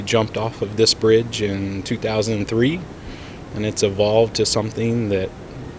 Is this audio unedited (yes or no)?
yes